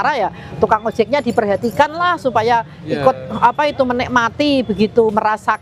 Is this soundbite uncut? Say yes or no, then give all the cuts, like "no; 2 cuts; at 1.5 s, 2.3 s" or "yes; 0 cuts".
yes; 0 cuts